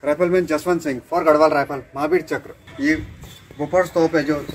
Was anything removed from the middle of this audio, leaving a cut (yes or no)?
yes